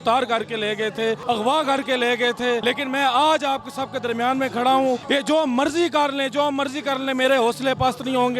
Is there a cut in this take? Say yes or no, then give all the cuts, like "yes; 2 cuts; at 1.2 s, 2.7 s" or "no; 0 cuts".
yes; 3 cuts; at 1.2 s, 2.6 s, 5.0 s